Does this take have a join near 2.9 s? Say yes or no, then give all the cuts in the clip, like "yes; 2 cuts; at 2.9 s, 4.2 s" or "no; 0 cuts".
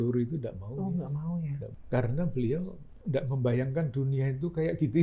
yes; 2 cuts; at 1.7 s, 2.9 s